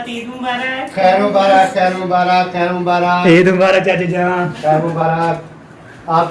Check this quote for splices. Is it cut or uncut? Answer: uncut